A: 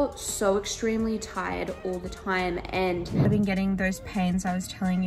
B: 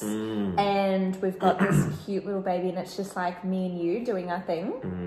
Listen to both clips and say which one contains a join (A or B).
A